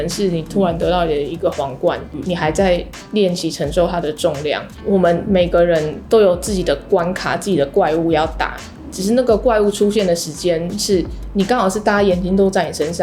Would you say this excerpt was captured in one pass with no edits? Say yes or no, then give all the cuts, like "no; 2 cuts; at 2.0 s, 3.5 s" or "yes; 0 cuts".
no; 2 cuts; at 2.1 s, 4.7 s